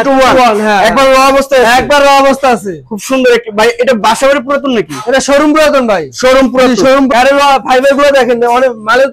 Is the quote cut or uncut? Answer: cut